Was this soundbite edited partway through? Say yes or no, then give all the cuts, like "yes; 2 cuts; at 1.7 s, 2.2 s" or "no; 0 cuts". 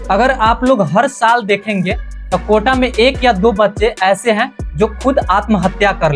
no; 0 cuts